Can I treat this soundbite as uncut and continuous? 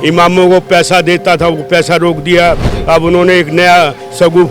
yes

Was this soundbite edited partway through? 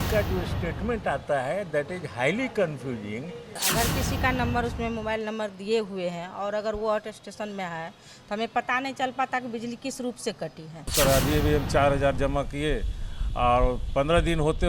yes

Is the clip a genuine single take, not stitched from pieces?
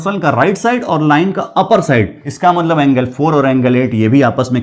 no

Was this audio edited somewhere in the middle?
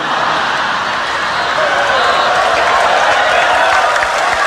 no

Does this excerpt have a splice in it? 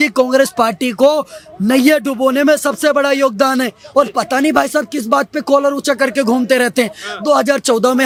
no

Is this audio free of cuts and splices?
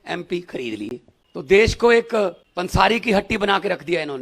no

